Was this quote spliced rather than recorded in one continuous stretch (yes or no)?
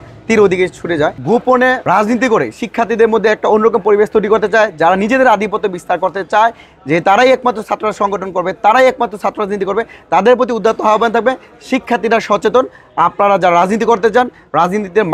yes